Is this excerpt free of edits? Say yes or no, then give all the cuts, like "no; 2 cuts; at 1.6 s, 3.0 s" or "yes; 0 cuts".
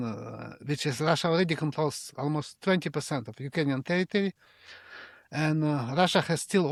yes; 0 cuts